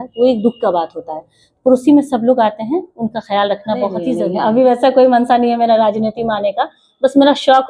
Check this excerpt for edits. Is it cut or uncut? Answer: cut